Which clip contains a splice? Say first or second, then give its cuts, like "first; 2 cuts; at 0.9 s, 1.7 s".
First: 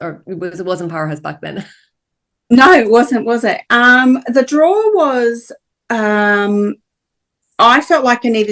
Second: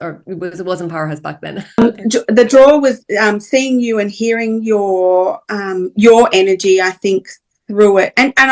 second; 1 cut; at 1.8 s